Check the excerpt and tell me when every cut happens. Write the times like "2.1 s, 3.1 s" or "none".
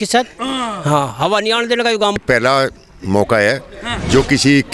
2.2 s